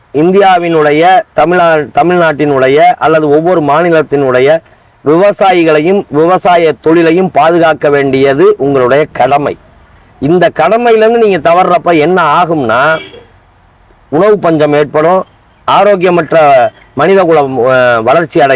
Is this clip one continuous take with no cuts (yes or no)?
yes